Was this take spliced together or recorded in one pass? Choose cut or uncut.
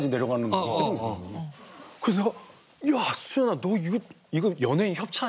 uncut